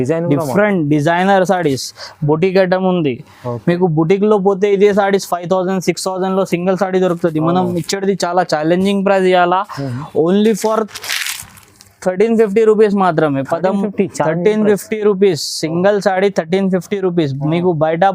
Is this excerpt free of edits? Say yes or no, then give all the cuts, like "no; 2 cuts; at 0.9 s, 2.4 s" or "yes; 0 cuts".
yes; 0 cuts